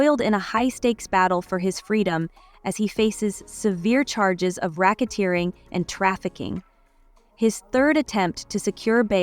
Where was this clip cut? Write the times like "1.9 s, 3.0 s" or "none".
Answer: 2.4 s